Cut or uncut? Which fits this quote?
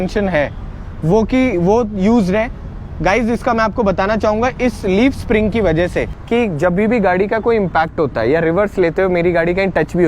cut